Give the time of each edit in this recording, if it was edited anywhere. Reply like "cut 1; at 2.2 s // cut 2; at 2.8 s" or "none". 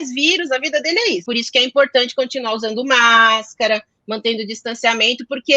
cut 1; at 1.2 s